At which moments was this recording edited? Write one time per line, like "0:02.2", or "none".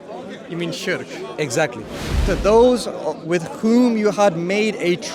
0:02.1